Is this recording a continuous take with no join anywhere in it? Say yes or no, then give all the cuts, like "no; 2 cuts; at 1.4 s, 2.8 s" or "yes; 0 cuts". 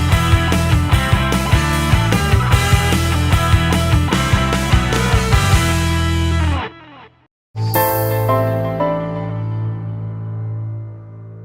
no; 1 cut; at 7.4 s